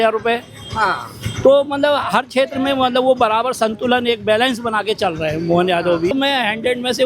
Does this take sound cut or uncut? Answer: cut